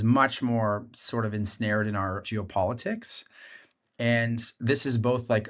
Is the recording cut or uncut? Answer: cut